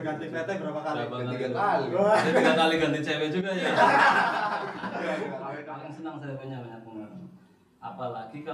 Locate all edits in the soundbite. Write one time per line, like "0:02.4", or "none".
0:05.4